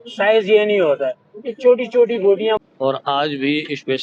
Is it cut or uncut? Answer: cut